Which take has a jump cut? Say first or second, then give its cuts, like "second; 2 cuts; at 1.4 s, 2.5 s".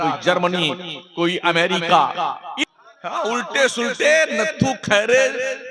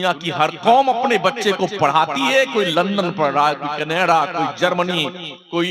first; 1 cut; at 2.5 s